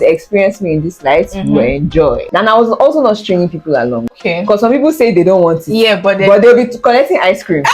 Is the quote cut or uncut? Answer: cut